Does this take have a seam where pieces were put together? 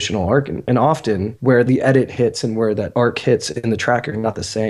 yes; 2 cuts; at 1.5 s, 2.9 s

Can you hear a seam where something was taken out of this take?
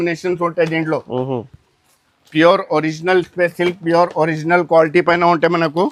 no; 0 cuts

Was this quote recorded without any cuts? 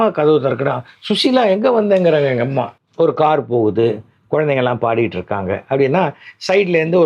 no; 1 cut; at 2.8 s

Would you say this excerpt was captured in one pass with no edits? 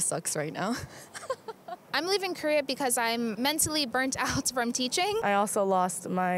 no; 2 cuts; at 1.8 s, 5.2 s

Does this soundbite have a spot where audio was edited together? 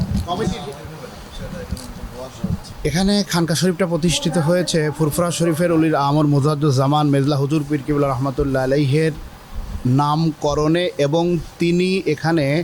yes; 1 cut; at 2.7 s

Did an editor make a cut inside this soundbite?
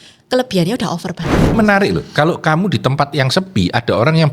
yes; 1 cut; at 1.5 s

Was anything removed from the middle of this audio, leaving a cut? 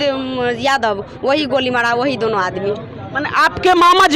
no; 0 cuts

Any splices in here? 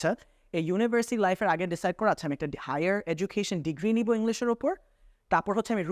no; 0 cuts

